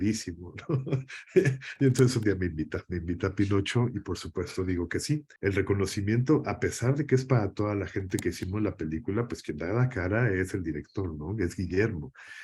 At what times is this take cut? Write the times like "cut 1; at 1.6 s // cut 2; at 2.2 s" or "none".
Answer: cut 1; at 5.3 s

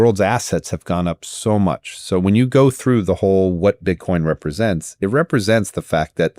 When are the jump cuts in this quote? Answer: none

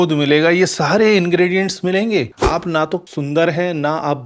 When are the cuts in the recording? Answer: cut 1; at 2.4 s

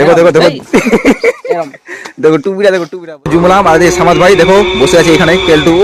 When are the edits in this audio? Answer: cut 1; at 3.3 s

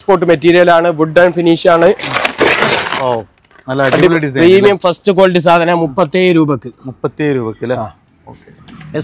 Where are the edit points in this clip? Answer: none

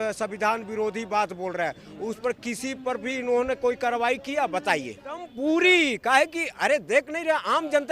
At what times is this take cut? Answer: cut 1; at 5.3 s

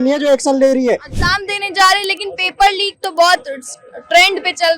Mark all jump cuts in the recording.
cut 1; at 1.1 s

